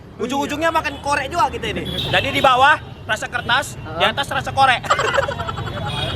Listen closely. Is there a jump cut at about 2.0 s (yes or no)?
yes